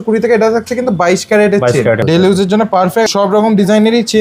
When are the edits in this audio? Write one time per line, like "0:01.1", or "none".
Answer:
0:02.0
0:03.1